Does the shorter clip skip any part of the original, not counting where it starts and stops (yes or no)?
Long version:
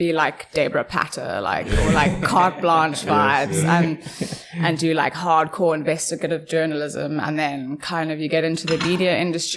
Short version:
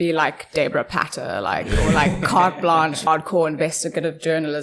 yes